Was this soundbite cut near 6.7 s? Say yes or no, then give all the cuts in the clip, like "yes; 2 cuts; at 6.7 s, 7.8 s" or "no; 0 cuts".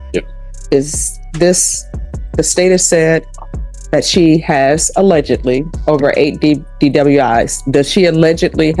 no; 0 cuts